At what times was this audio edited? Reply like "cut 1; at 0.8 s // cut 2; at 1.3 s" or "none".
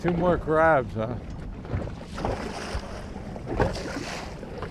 cut 1; at 2.1 s